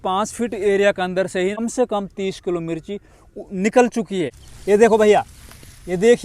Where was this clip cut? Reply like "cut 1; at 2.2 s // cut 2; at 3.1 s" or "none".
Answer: cut 1; at 1.6 s // cut 2; at 4.4 s